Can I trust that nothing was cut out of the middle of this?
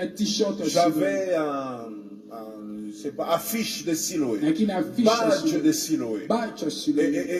yes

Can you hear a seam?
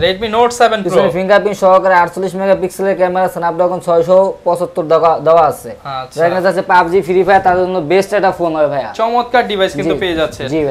no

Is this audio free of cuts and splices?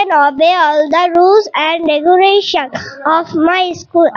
yes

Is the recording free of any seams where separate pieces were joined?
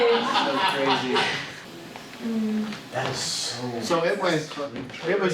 no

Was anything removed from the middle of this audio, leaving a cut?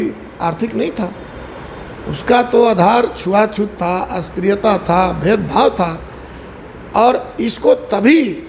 no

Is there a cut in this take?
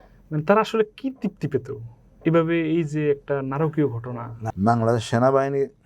yes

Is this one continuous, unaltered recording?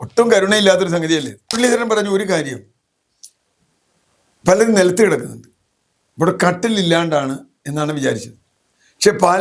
no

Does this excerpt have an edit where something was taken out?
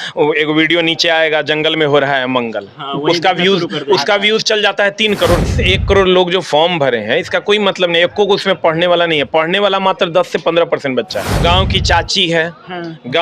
yes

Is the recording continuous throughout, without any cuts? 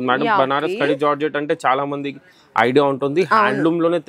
yes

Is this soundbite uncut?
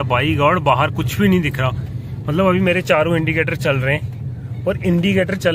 yes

